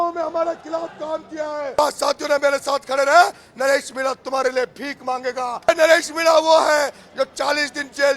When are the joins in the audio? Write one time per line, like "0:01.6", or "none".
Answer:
0:01.8
0:05.7